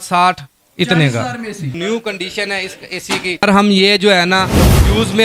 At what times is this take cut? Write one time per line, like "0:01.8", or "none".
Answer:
0:01.7
0:03.4